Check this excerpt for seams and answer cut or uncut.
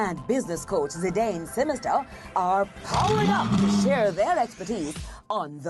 uncut